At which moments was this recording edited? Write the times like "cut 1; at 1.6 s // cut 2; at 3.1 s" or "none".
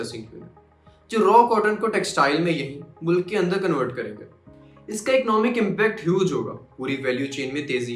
none